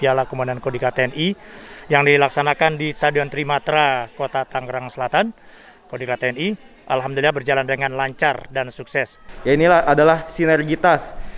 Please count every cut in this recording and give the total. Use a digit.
1